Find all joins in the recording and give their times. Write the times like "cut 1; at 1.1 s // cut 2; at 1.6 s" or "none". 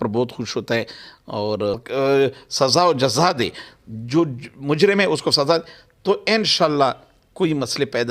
cut 1; at 1.8 s